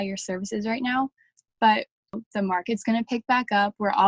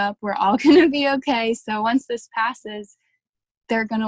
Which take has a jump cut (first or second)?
first